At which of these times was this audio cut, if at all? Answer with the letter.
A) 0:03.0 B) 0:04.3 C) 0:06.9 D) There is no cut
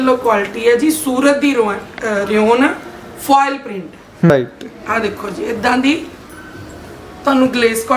B